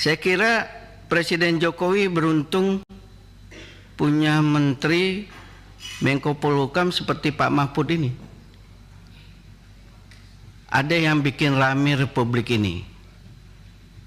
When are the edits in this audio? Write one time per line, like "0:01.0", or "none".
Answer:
none